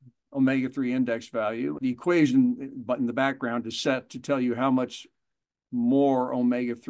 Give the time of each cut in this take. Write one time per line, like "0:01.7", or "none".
0:01.8